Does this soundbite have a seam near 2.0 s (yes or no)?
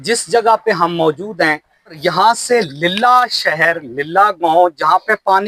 yes